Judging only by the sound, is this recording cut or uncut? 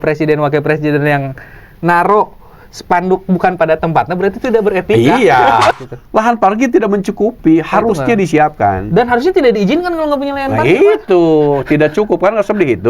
cut